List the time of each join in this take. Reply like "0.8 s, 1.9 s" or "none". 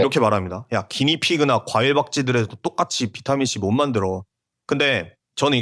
none